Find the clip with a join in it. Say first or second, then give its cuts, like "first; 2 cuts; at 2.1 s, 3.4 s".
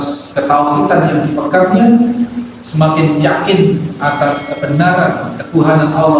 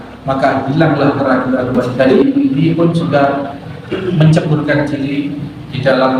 second; 1 cut; at 2.1 s